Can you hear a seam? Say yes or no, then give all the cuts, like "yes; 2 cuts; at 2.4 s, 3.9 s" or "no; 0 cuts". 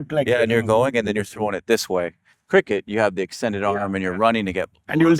yes; 1 cut; at 2.3 s